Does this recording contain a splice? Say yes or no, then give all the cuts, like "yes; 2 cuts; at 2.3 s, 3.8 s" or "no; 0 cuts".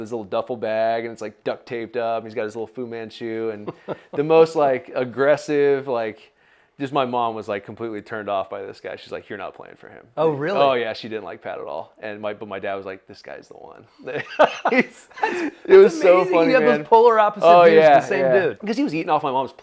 yes; 1 cut; at 18.6 s